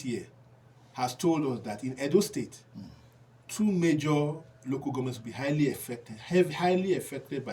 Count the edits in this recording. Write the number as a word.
zero